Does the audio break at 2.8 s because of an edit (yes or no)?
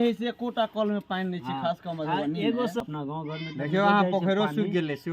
yes